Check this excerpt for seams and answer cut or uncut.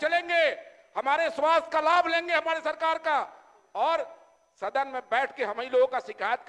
uncut